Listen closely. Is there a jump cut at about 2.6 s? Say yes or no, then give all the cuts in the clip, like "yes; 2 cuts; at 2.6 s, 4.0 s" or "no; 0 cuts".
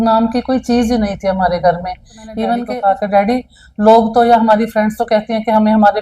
yes; 1 cut; at 2.6 s